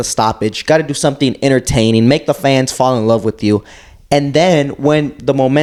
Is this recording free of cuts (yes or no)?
yes